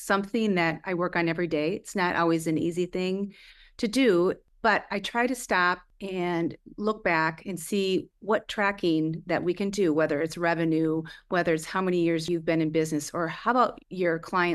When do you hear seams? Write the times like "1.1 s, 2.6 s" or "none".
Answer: 4.5 s, 5.9 s, 8.1 s, 12.2 s